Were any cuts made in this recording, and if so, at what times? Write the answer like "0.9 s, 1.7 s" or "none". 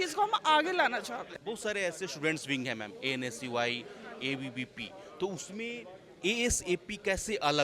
1.2 s